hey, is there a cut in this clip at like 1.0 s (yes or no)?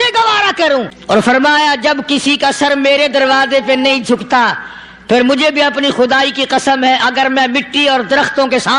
yes